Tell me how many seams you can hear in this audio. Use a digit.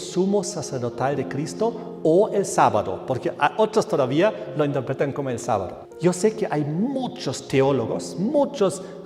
1